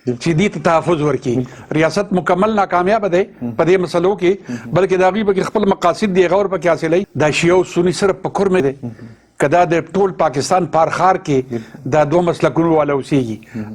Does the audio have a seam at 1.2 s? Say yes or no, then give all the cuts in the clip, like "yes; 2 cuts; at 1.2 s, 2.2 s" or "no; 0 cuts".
no; 2 cuts; at 7.1 s, 8.6 s